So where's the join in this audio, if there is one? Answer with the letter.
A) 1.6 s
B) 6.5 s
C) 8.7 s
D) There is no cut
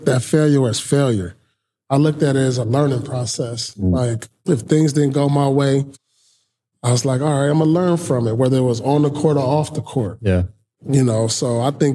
D